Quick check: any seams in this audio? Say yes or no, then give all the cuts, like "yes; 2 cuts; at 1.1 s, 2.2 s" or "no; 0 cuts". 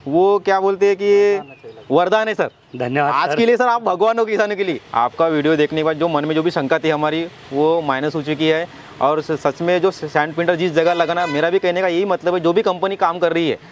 yes; 1 cut; at 4.8 s